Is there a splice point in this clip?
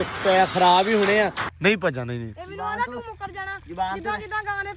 yes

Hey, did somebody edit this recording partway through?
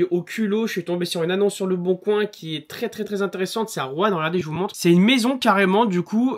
no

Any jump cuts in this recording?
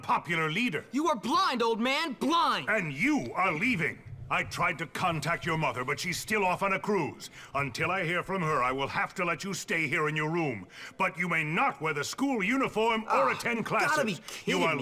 yes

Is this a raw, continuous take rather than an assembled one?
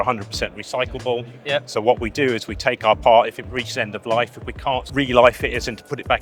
no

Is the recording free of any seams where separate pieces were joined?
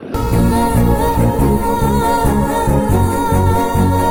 yes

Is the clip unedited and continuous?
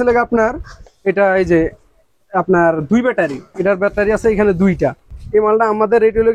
no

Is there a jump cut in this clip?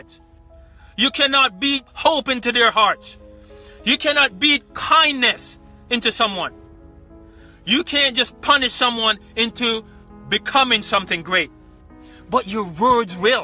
no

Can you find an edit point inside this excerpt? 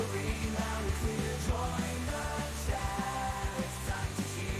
no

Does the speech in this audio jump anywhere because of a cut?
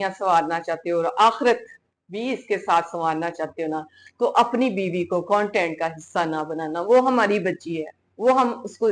no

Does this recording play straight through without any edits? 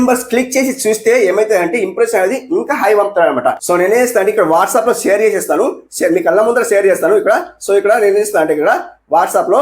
yes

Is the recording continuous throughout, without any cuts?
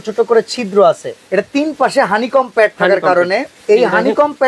no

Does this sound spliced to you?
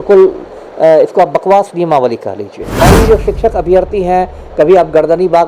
yes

